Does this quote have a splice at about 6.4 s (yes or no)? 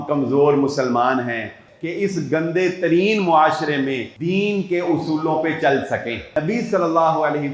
yes